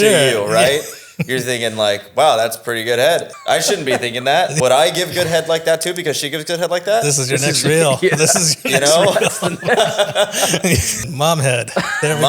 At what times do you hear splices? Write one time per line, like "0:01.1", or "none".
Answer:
0:03.3
0:04.5
0:11.0